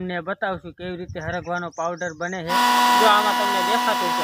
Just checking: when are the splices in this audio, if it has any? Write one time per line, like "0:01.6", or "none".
0:02.5

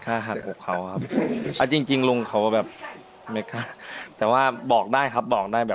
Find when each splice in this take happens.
none

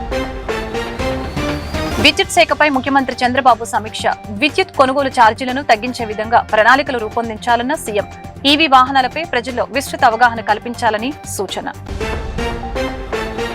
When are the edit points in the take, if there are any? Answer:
0:01.9

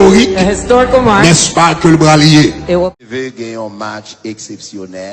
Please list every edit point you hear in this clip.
0:02.9

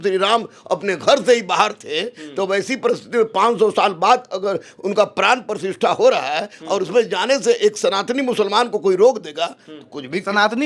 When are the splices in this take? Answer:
none

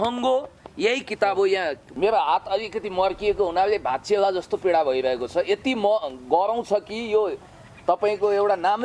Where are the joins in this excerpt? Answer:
0:01.8

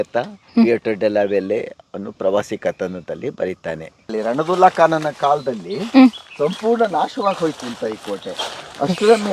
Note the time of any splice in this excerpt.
0:04.1

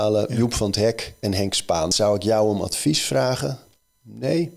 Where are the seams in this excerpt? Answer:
0:01.9

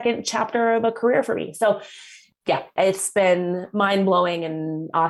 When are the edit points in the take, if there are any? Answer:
0:02.1

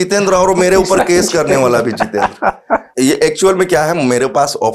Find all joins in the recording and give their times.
0:02.9

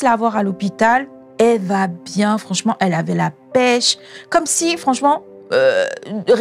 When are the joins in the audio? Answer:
none

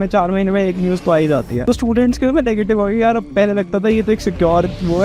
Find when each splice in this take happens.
0:01.5

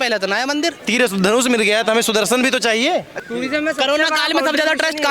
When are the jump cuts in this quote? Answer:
0:00.8
0:03.1

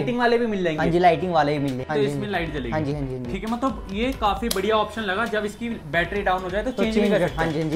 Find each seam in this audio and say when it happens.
0:01.9

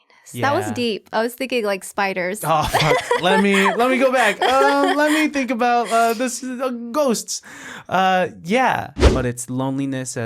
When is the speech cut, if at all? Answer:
0:09.1

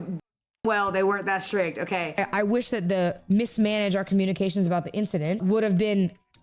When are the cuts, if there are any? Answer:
0:02.1
0:05.4

